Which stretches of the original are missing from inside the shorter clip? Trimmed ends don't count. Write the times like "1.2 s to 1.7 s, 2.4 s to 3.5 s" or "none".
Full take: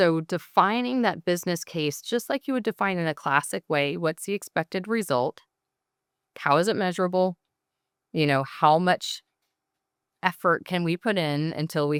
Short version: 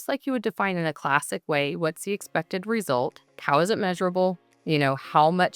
5.5 s to 6.3 s, 7.5 s to 8.0 s